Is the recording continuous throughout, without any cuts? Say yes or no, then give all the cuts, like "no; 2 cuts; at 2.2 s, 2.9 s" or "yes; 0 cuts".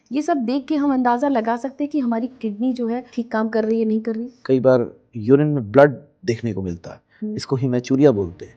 no; 2 cuts; at 3.1 s, 4.4 s